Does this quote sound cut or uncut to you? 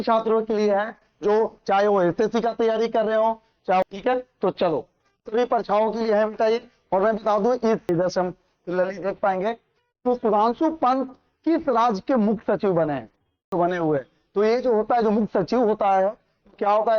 cut